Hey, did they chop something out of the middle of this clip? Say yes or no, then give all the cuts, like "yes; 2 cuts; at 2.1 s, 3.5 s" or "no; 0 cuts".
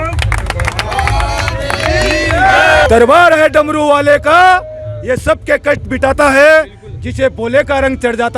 yes; 1 cut; at 2.9 s